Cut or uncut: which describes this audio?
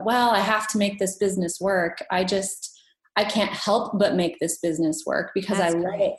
uncut